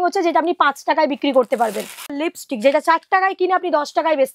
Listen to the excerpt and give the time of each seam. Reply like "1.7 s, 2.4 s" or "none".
2.2 s